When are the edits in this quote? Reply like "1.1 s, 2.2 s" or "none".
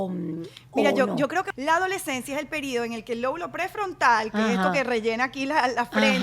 1.5 s